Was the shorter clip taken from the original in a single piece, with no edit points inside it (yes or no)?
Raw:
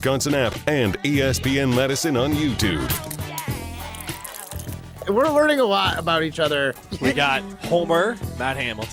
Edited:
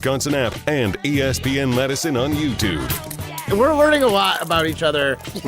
no